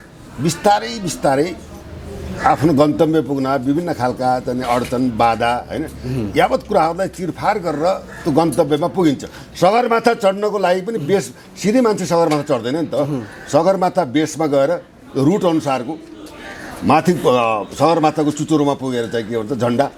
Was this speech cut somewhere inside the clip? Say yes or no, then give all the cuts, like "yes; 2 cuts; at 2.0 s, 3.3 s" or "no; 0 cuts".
no; 0 cuts